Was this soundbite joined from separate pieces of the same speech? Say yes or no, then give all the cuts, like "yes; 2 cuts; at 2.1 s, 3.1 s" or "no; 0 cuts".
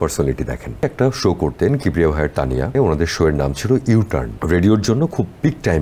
yes; 3 cuts; at 0.8 s, 2.8 s, 4.3 s